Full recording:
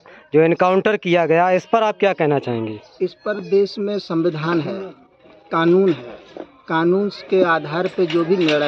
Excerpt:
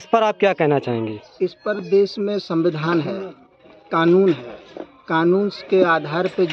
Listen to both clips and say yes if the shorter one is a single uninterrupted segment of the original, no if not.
yes